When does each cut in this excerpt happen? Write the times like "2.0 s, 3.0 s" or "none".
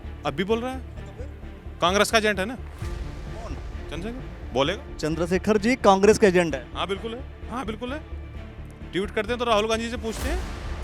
none